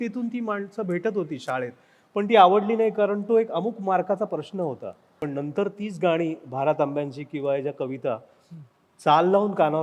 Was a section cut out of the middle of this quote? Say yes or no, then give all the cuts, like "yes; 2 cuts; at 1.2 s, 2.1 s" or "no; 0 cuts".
yes; 1 cut; at 5.2 s